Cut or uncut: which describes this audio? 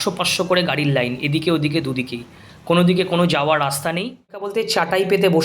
cut